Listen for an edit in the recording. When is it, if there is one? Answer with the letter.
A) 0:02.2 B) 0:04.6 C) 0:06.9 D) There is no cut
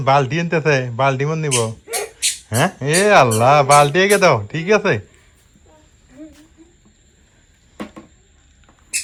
D